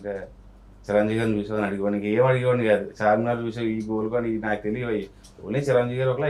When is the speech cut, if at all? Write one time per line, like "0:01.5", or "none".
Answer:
none

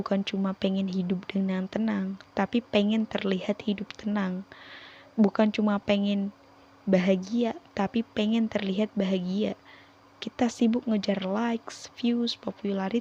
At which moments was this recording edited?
none

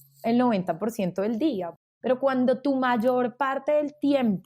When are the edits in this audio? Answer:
0:01.8

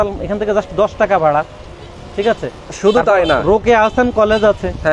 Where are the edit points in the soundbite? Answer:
none

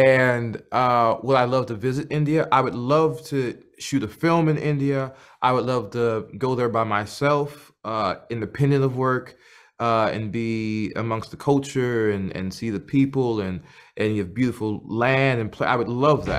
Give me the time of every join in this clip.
none

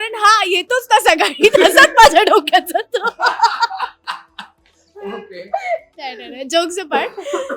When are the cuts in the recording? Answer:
none

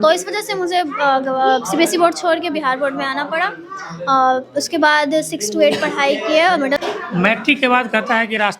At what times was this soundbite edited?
0:06.8

